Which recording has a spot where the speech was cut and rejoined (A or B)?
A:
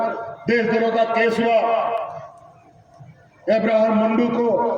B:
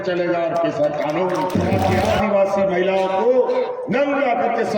B